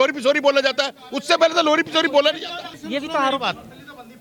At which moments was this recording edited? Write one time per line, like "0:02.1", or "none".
0:02.7